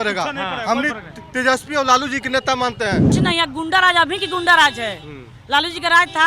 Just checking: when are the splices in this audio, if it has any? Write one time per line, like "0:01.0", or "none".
0:03.2